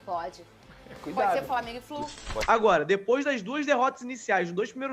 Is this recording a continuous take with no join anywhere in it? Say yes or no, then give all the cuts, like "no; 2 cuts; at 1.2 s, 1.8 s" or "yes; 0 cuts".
no; 1 cut; at 2.2 s